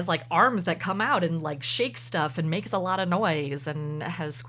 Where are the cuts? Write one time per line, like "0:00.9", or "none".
none